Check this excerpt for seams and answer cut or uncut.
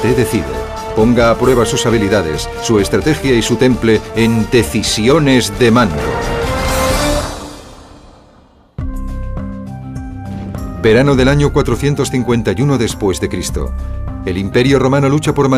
cut